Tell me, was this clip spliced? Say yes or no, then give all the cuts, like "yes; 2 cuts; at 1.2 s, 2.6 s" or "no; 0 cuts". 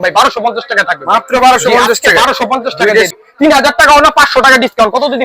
yes; 1 cut; at 3.1 s